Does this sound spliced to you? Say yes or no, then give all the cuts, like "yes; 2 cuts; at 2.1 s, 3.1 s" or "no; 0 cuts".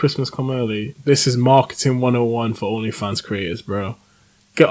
yes; 1 cut; at 0.9 s